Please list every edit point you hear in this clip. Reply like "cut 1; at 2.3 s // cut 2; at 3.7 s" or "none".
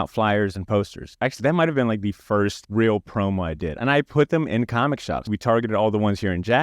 cut 1; at 1.1 s // cut 2; at 3.8 s // cut 3; at 5.2 s